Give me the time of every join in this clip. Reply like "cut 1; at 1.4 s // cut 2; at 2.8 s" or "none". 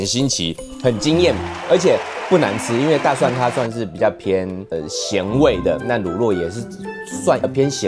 none